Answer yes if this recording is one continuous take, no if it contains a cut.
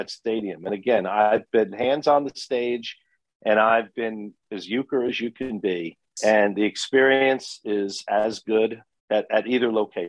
no